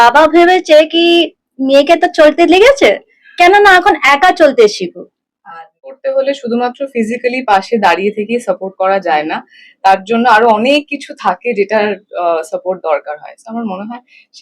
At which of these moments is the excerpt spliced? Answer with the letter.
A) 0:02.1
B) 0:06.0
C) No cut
B